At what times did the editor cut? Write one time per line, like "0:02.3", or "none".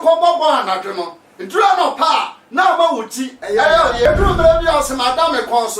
0:04.0